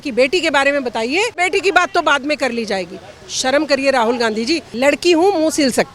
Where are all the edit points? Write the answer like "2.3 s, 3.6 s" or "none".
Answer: 1.3 s, 4.7 s